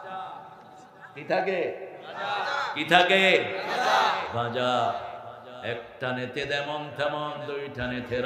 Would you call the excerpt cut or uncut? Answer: uncut